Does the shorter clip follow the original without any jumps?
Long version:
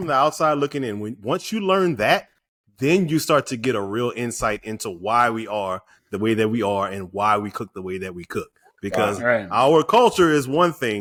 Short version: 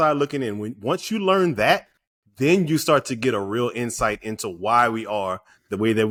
yes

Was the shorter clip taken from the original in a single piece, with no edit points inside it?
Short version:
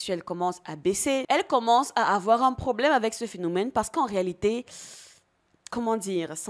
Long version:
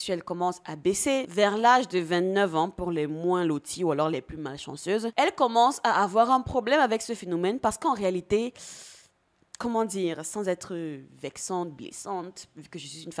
no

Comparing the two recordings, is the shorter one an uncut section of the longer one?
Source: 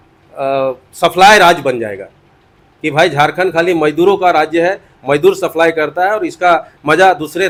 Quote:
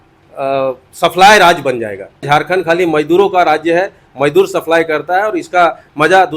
no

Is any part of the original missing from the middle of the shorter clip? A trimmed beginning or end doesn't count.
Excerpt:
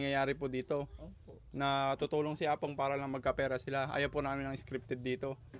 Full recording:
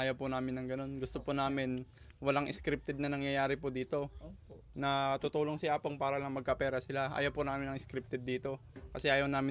no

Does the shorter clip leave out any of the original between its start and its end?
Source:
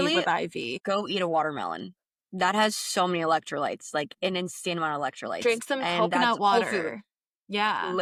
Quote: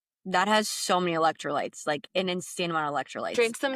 no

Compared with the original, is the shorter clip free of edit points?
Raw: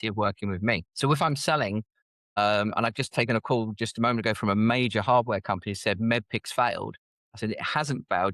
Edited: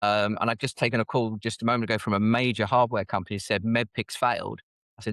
yes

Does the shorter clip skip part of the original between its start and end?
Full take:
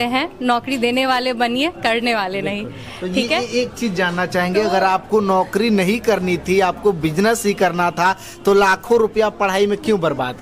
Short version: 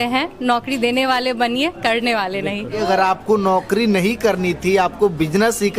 yes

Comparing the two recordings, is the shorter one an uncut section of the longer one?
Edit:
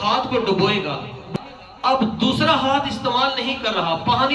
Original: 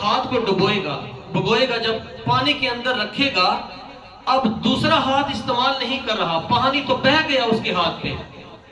no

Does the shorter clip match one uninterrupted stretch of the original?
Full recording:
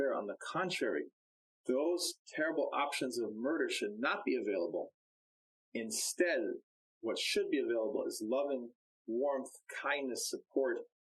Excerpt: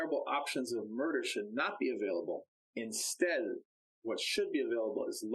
no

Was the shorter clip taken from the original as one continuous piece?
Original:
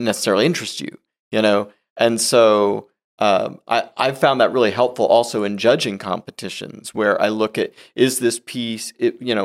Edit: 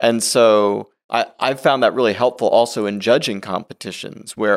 no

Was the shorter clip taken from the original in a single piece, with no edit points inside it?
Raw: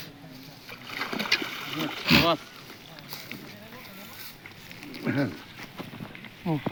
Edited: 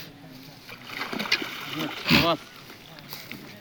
yes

